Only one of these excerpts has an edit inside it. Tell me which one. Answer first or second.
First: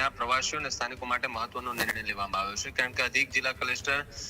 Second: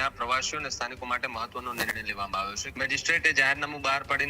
second